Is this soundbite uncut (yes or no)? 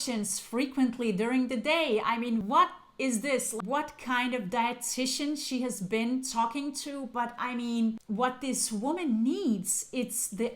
no